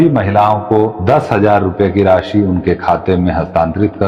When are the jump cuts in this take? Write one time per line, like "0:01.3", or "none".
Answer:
0:01.0